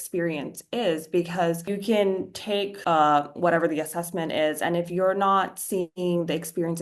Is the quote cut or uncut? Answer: cut